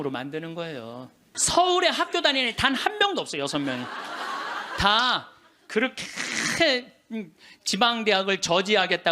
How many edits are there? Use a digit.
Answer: 1